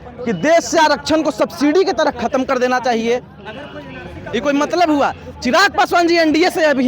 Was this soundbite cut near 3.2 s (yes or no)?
no